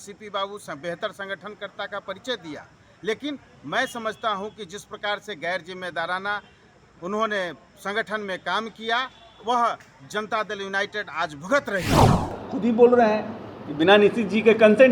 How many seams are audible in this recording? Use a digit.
2